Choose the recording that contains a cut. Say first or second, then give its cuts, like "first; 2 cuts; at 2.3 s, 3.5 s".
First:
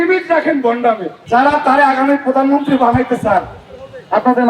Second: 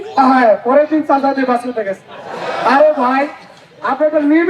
first; 1 cut; at 1.1 s